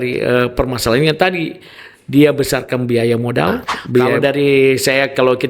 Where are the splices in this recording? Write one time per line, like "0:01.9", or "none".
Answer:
0:04.1